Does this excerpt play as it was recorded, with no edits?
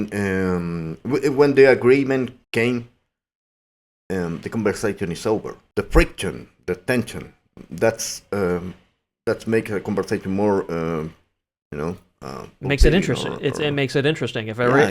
no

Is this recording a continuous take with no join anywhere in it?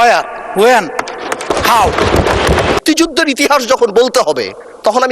no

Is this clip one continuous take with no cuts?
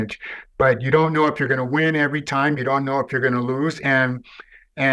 yes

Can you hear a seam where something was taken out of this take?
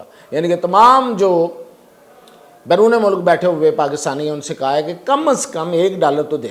no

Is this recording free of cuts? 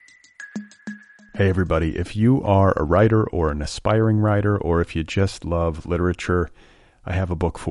no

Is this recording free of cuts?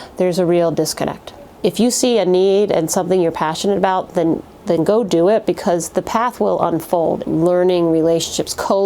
no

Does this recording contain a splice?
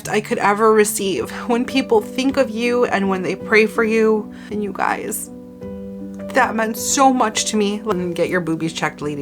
yes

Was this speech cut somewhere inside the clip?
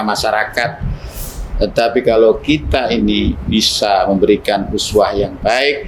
yes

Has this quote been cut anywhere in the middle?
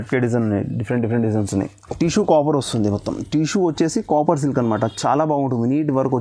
yes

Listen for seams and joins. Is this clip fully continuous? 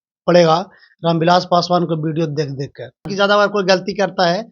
no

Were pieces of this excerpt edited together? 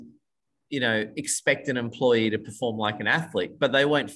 no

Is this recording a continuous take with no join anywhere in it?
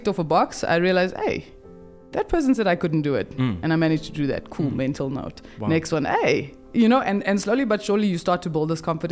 yes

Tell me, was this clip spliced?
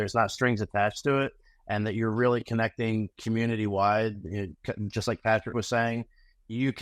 no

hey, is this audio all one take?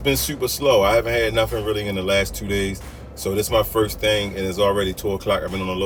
yes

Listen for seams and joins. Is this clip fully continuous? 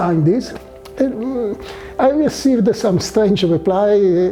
yes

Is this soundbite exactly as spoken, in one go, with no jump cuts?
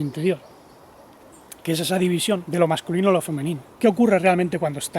no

